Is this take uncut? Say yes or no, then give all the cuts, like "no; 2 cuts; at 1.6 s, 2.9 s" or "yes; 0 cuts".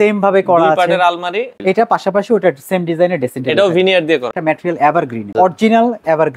no; 3 cuts; at 1.5 s, 4.3 s, 5.3 s